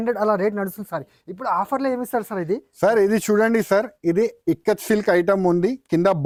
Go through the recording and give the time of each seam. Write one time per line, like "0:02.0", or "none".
none